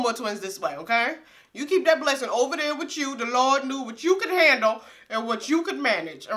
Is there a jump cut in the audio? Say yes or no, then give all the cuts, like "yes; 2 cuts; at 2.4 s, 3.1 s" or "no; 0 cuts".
no; 0 cuts